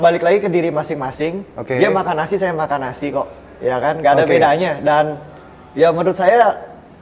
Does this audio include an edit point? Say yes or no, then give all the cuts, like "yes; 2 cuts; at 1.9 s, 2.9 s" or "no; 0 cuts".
no; 0 cuts